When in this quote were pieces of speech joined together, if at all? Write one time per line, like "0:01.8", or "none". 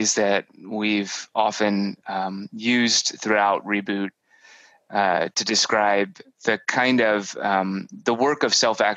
none